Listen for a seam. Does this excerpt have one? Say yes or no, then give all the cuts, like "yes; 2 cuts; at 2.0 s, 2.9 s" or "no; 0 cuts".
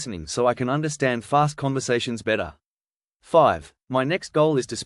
no; 0 cuts